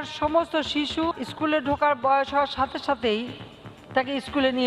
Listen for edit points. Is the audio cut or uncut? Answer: cut